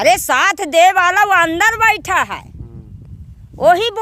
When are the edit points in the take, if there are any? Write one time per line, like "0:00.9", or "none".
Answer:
none